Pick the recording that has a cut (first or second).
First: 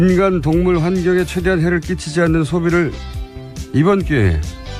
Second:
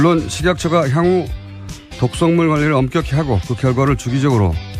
first